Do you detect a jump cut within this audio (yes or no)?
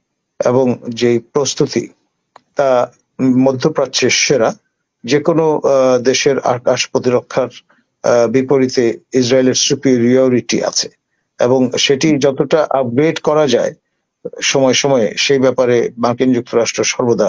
no